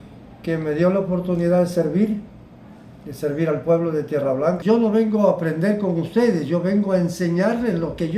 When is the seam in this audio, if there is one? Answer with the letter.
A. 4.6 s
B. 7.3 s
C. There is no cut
A